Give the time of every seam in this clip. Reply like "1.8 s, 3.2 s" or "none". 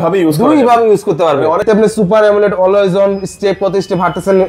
1.6 s